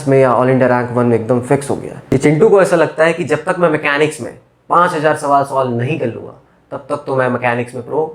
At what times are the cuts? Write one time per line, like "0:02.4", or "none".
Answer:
0:01.9